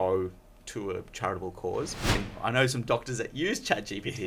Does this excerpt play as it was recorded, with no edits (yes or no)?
no